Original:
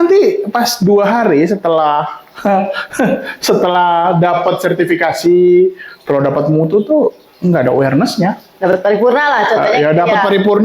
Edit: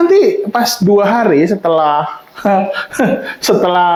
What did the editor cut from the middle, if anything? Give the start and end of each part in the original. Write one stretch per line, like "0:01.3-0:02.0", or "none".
none